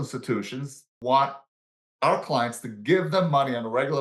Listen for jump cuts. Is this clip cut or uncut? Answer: cut